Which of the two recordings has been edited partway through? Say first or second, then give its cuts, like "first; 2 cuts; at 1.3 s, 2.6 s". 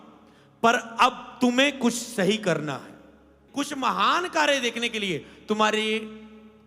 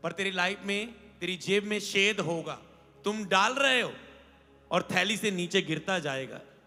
first; 1 cut; at 3.3 s